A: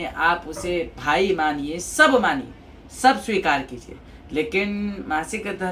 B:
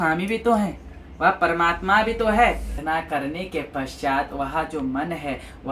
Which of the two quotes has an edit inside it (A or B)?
B